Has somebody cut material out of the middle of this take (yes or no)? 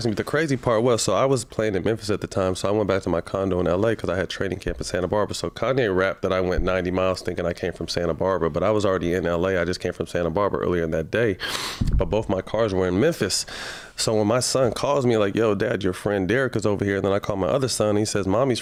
no